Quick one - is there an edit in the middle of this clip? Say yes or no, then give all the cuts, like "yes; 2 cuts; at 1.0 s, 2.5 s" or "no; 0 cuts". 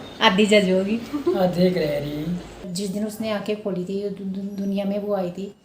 yes; 1 cut; at 2.7 s